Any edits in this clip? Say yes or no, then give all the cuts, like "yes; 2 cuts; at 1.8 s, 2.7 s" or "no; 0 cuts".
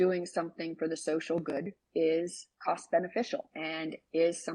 yes; 2 cuts; at 2.4 s, 3.5 s